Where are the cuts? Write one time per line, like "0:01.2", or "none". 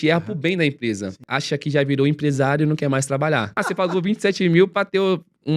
0:01.3
0:03.5